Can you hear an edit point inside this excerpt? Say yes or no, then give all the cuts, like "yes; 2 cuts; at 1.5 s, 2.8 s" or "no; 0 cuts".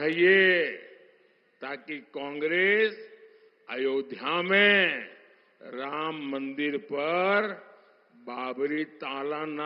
no; 0 cuts